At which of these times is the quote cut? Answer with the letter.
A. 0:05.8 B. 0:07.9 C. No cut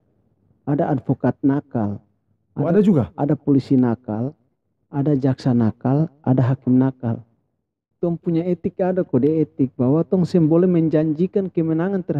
B